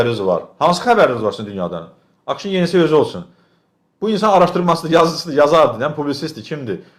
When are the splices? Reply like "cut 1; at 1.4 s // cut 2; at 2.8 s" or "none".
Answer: none